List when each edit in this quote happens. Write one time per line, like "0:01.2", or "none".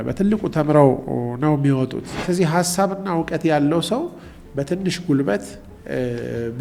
0:02.1